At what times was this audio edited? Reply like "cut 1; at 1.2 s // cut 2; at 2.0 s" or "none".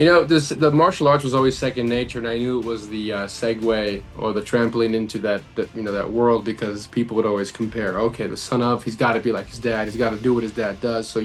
none

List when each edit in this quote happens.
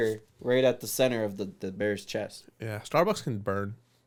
none

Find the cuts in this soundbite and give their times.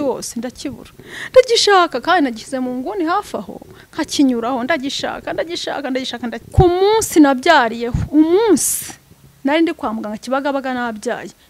cut 1; at 6.4 s

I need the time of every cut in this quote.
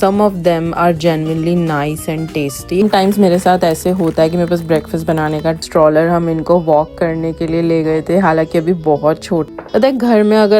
cut 1; at 2.8 s // cut 2; at 5.6 s // cut 3; at 9.5 s

